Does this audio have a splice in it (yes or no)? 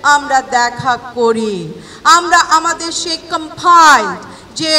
no